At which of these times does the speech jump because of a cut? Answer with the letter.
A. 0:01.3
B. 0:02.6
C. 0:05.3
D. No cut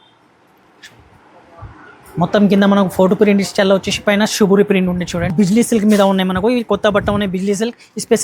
C